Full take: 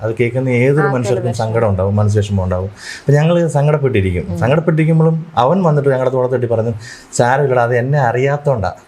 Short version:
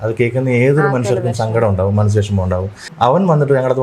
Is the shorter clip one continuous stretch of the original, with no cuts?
no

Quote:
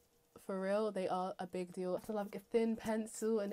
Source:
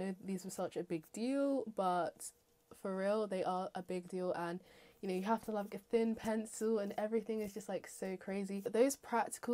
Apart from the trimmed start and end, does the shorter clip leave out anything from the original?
yes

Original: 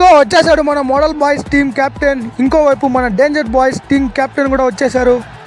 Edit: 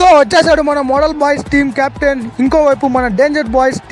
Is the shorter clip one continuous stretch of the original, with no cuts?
yes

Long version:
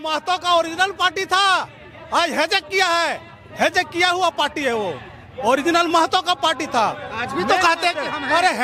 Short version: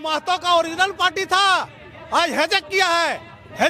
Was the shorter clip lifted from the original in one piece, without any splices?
yes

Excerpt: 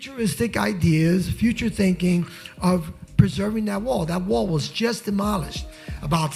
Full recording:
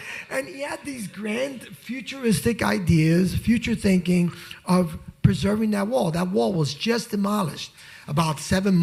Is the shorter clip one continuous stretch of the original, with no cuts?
yes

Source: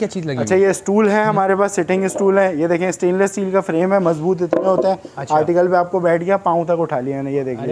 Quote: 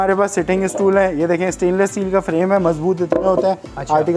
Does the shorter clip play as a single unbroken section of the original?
yes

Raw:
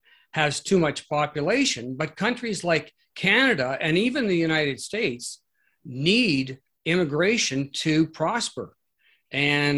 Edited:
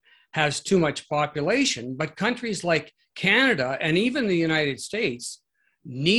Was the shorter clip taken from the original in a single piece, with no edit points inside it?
yes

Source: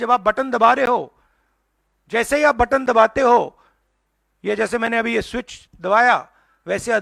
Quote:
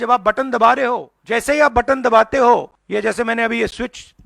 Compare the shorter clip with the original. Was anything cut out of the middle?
yes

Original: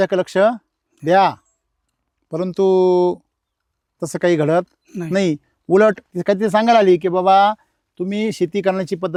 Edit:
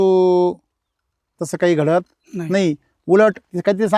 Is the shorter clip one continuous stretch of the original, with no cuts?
yes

